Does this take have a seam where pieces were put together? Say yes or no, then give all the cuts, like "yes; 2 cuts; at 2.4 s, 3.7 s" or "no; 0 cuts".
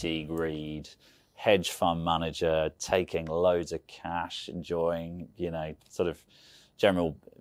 no; 0 cuts